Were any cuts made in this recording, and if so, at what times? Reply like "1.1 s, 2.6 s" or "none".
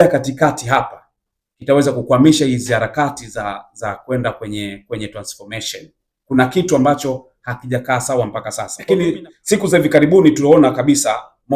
9.0 s